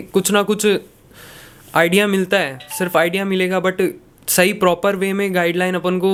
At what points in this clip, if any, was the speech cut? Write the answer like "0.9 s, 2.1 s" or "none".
none